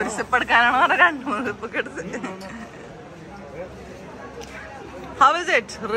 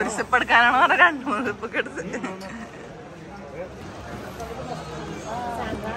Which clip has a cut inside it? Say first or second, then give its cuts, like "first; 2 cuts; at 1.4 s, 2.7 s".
second; 1 cut; at 3.8 s